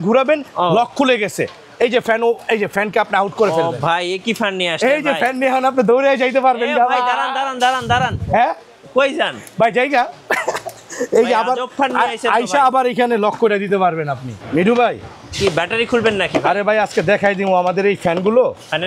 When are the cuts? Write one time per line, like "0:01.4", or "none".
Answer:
0:14.3